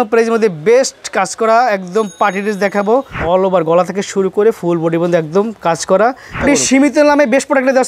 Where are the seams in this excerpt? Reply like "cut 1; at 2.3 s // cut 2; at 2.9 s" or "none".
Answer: cut 1; at 3.2 s // cut 2; at 6.4 s